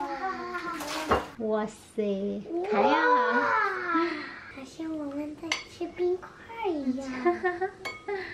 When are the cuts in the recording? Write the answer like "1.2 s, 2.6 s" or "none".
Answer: 1.3 s